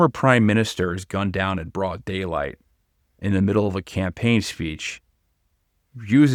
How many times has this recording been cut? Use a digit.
0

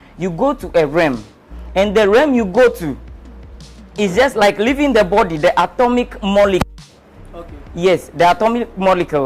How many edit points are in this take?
0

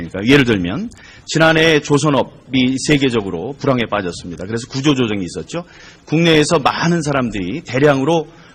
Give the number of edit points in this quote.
0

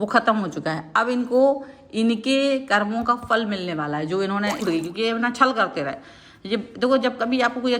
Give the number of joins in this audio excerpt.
1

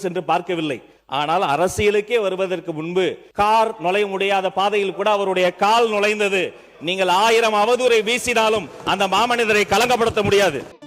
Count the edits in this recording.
2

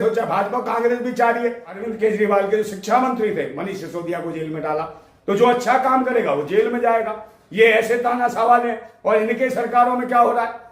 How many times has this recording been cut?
1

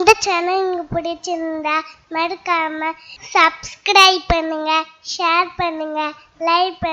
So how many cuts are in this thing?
0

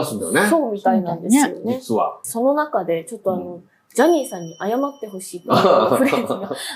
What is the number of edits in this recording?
1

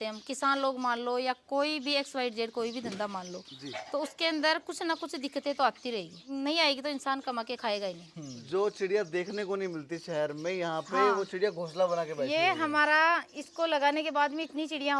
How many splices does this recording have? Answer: 2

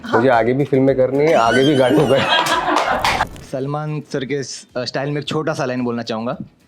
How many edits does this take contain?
1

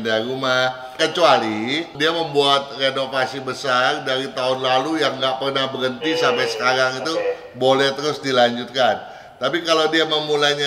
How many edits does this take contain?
2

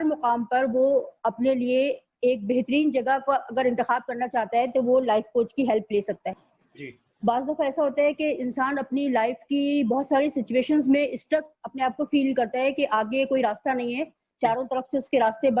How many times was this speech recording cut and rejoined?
1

